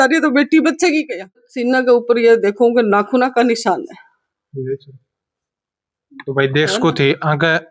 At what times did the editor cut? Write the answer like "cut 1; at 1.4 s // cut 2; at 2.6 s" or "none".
cut 1; at 1.5 s